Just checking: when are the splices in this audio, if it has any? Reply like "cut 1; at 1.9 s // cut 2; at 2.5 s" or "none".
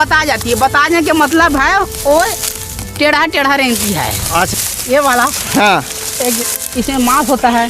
cut 1; at 4.5 s